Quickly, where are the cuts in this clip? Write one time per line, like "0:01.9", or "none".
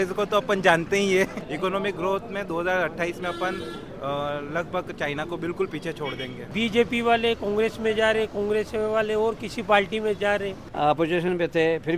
0:01.4
0:06.4
0:10.7